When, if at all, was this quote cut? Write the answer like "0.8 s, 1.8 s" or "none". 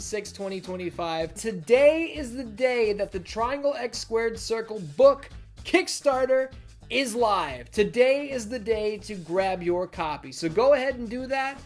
1.4 s